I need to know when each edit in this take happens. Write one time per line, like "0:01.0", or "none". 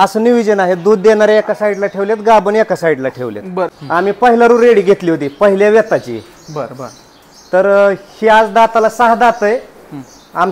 0:03.6

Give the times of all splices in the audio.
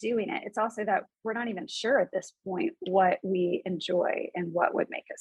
none

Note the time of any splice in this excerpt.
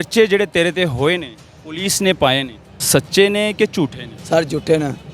0:02.8

